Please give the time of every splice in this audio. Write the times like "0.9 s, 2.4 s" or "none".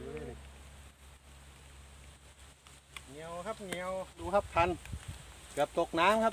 4.2 s